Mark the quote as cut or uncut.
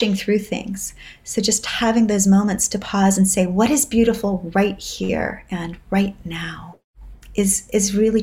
uncut